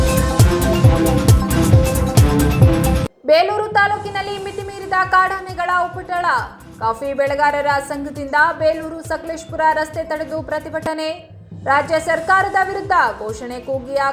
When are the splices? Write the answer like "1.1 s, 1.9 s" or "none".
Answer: 3.0 s